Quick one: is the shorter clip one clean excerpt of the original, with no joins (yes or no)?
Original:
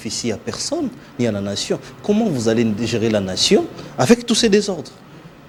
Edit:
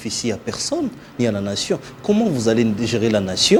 yes